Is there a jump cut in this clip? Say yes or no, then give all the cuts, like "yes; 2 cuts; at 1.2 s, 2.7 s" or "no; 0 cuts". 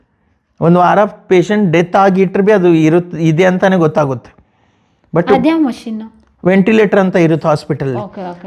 no; 0 cuts